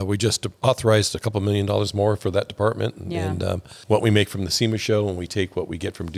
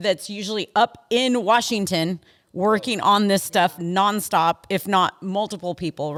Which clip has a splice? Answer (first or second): first